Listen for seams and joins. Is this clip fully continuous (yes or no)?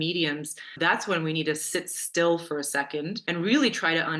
no